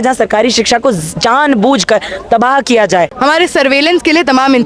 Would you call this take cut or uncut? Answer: cut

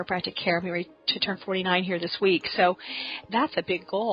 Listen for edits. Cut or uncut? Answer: cut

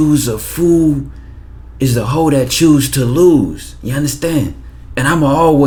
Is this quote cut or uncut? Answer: uncut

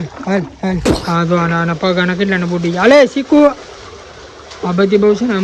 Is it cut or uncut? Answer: cut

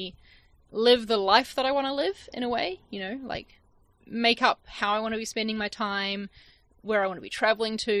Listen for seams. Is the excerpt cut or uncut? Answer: uncut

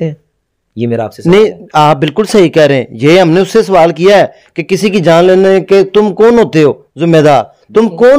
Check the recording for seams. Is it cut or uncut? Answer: uncut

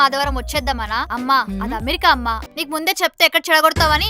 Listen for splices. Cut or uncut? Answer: cut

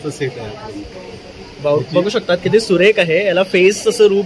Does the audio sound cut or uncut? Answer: cut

